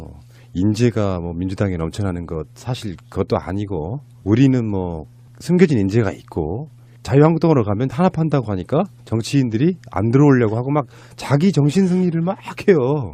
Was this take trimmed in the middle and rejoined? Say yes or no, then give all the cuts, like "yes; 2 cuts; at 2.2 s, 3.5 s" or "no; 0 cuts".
yes; 1 cut; at 4.7 s